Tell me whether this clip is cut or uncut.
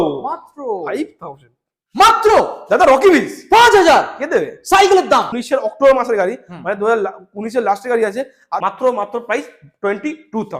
cut